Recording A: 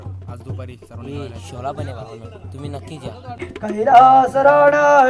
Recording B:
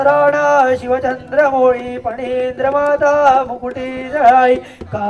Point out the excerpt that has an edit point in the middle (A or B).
A